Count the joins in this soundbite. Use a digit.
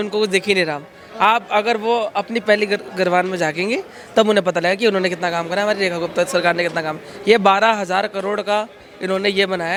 0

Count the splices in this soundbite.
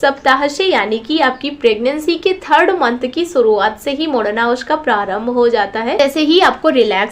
1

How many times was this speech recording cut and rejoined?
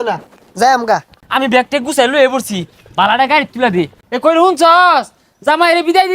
2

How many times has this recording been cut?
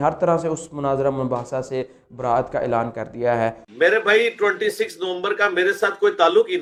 0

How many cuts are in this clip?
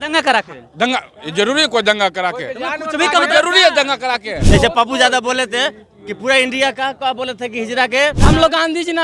2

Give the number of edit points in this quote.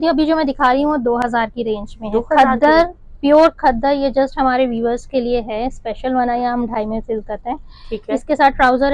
0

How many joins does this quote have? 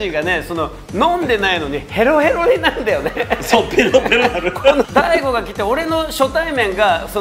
1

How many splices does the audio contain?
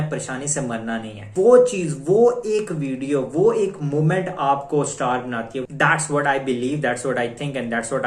2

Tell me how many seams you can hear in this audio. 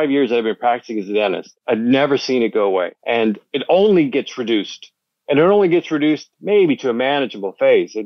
2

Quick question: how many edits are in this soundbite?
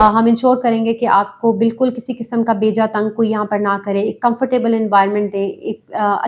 0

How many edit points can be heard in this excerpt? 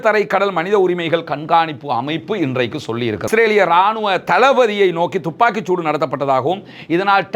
1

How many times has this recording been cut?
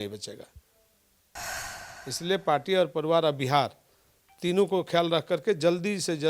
0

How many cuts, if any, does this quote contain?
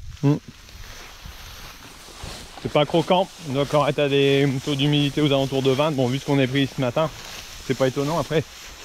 0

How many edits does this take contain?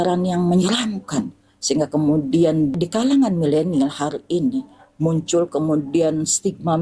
1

